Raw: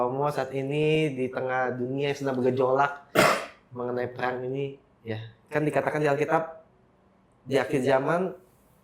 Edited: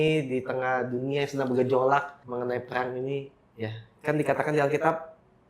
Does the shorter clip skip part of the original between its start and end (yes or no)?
yes